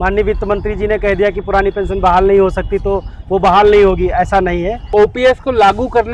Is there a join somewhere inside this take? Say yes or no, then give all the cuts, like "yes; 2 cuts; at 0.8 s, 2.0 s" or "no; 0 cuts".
yes; 1 cut; at 4.9 s